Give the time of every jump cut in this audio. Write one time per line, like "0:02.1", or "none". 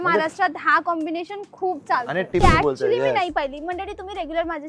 0:02.4